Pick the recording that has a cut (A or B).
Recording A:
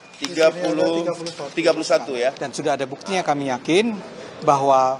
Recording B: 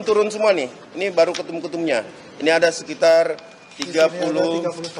A